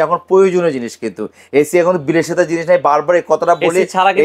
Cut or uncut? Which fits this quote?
uncut